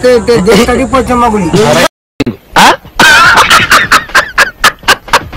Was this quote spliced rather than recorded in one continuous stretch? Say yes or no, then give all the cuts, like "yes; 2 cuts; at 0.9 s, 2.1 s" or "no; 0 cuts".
yes; 1 cut; at 2.1 s